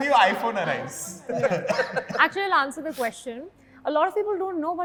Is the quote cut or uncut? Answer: uncut